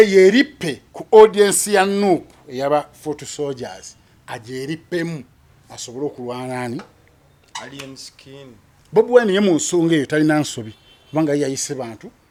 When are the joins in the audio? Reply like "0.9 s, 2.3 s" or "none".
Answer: none